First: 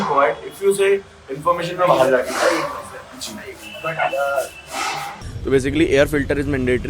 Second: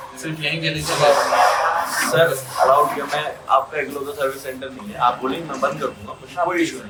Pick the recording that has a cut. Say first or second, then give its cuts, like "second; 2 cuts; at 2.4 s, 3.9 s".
first; 1 cut; at 5.3 s